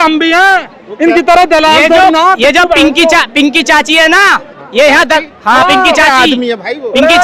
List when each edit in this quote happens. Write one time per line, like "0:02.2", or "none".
none